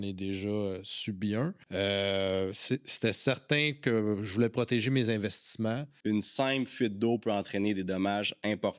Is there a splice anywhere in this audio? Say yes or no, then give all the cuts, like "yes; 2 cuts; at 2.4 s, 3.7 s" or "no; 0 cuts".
yes; 1 cut; at 6.0 s